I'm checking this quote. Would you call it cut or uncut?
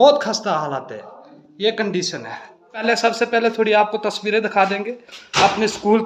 cut